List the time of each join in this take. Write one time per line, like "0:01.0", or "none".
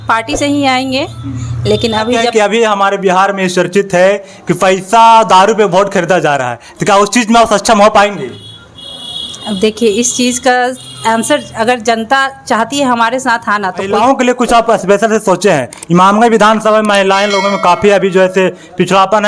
0:02.3
0:13.9

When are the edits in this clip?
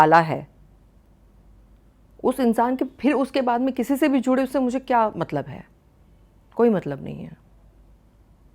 none

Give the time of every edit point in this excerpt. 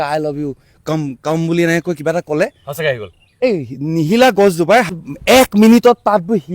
0:04.9

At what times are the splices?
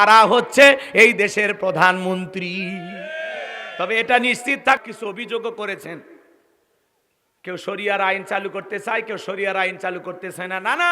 0:05.0

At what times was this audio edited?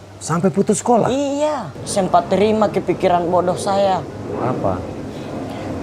0:01.8

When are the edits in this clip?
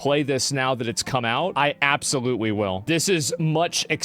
0:01.5
0:02.8

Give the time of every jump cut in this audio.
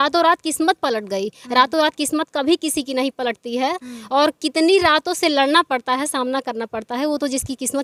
none

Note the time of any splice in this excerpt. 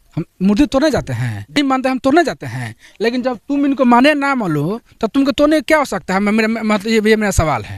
none

